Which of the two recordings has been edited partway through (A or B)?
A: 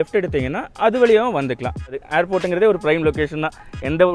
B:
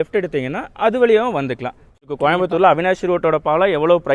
A